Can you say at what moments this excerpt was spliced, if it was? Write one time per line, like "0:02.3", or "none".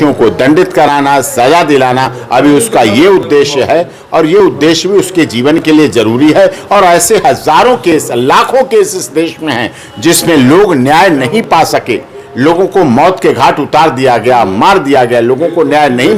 none